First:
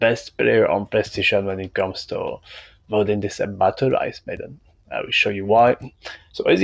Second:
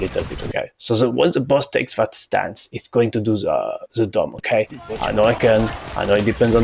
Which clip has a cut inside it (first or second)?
second